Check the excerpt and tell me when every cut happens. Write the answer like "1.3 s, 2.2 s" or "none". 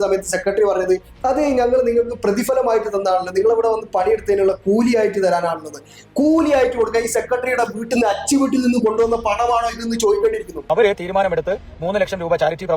10.6 s